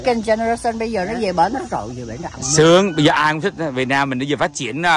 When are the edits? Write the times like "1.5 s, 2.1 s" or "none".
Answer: none